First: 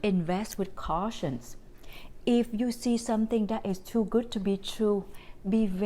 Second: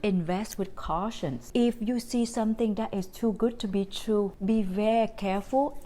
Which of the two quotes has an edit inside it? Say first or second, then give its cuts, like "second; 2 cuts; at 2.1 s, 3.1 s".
second; 2 cuts; at 1.4 s, 4.4 s